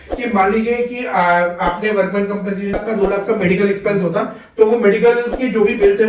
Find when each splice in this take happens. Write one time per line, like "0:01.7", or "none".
0:02.7